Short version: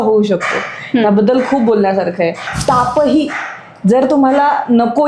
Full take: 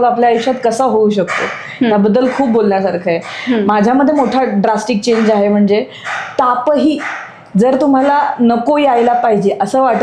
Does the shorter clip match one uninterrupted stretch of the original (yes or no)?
no